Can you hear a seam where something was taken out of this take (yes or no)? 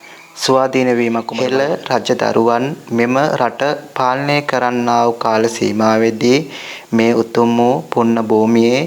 yes